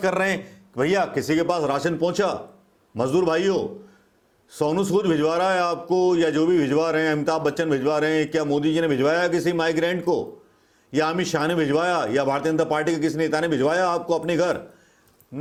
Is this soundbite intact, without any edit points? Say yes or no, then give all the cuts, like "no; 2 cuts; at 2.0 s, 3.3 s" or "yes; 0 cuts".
yes; 0 cuts